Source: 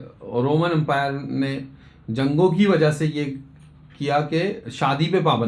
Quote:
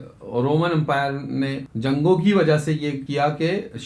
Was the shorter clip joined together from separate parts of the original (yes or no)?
yes